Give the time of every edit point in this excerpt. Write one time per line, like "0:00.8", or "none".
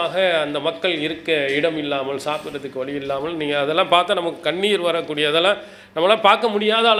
none